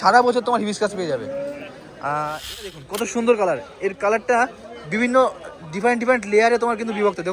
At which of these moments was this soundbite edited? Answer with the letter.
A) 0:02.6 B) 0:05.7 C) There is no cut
A